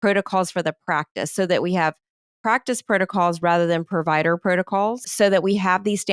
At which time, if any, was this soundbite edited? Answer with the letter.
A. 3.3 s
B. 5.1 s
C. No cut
B